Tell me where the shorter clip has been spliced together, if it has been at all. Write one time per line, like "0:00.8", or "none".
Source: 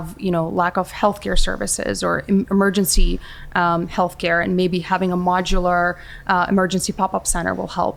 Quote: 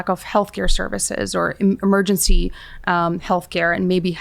none